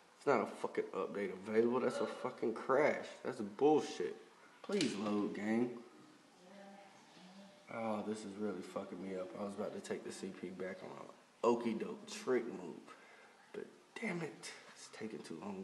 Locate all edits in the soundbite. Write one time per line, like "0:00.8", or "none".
0:08.3